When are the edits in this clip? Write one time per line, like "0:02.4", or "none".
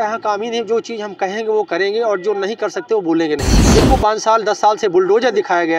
0:03.6